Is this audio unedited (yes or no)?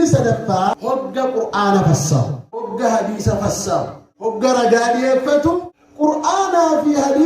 no